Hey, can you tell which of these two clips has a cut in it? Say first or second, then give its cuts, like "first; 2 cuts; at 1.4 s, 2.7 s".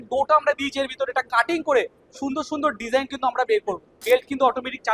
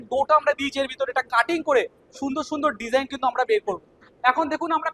first; 1 cut; at 3.9 s